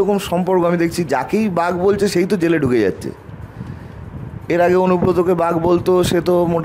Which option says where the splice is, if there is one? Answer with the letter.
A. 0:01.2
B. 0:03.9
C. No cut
C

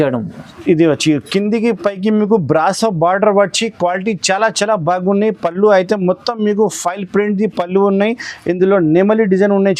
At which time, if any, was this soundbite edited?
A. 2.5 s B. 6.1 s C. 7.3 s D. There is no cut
D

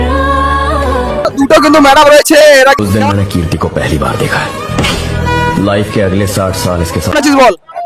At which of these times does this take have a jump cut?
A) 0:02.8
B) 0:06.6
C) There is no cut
A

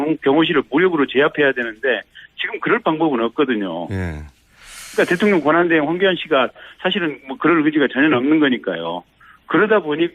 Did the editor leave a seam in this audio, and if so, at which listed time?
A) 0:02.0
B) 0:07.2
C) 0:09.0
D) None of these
A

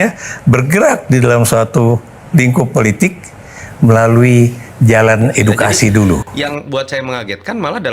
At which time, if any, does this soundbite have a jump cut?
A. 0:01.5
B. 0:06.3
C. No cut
B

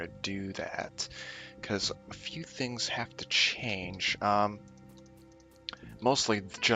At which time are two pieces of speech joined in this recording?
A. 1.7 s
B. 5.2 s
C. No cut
A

